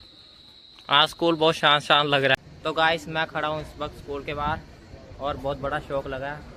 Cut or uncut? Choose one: cut